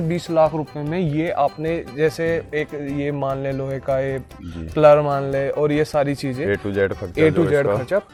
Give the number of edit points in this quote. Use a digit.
0